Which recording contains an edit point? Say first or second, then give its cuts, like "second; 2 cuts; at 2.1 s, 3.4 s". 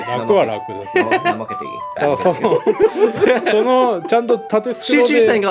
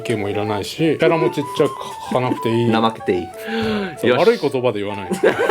second; 2 cuts; at 1.0 s, 3.4 s